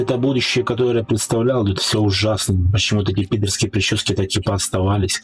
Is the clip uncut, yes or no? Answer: yes